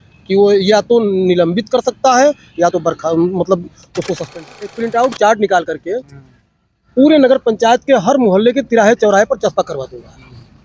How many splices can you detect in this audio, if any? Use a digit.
1